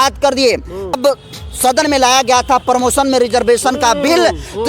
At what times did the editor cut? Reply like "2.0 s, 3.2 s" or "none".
0.9 s